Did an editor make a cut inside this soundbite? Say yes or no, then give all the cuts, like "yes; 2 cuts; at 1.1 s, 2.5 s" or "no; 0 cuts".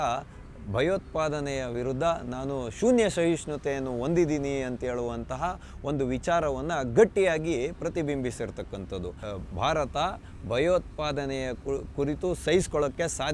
yes; 1 cut; at 9.2 s